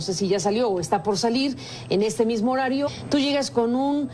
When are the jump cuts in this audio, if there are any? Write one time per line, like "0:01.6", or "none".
none